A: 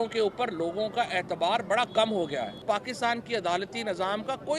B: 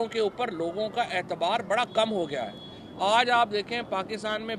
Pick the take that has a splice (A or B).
A